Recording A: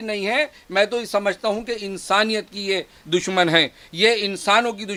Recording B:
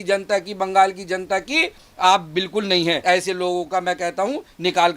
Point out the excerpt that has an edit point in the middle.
B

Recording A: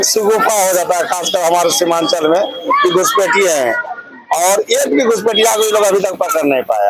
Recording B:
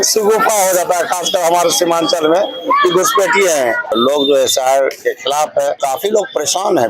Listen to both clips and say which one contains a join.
B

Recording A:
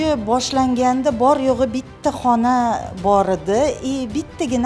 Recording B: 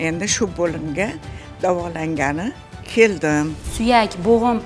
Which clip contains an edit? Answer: B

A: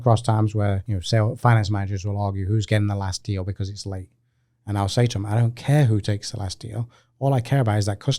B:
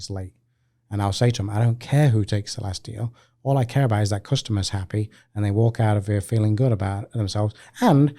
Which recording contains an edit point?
A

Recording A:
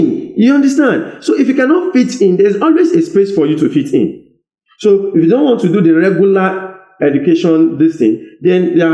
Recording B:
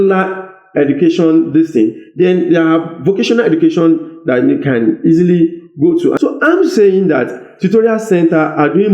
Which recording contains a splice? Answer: B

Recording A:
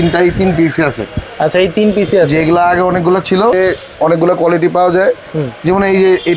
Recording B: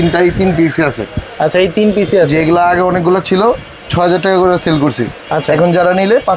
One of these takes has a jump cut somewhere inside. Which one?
A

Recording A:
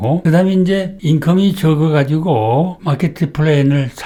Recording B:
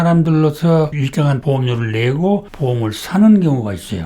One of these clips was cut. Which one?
B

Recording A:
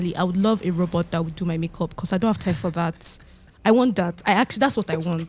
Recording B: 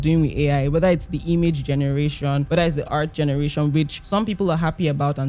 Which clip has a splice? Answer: B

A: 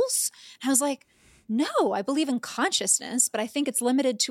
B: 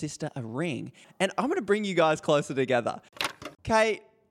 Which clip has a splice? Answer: B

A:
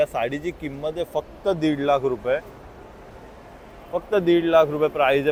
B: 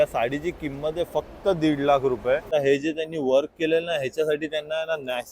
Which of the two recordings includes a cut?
B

